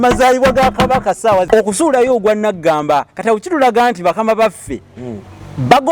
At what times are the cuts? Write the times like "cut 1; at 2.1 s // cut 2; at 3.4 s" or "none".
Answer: cut 1; at 1.5 s